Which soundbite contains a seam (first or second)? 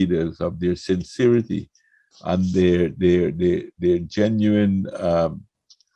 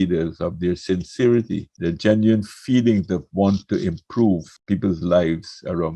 second